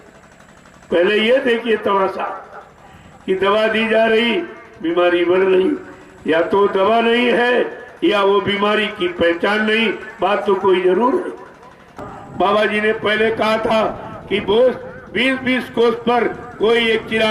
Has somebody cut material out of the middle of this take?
yes; 1 cut; at 12.0 s

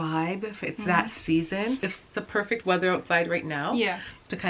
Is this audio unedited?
no; 1 cut; at 2.0 s

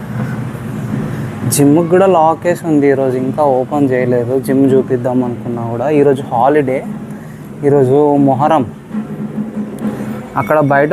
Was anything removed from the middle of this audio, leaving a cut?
no; 0 cuts

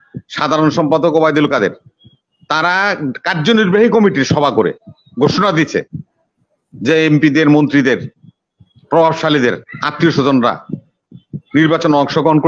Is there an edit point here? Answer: no; 0 cuts

